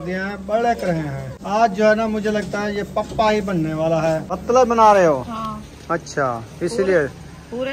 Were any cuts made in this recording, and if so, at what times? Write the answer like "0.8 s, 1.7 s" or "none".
1.3 s, 4.3 s